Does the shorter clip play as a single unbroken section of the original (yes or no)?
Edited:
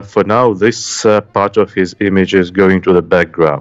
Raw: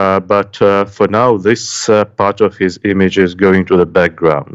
yes